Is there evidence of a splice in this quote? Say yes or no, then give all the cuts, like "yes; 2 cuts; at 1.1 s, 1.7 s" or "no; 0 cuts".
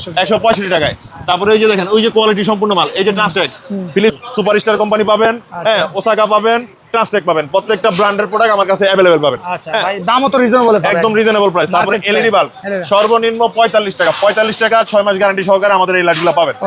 yes; 1 cut; at 4.2 s